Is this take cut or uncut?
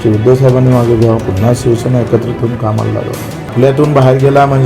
cut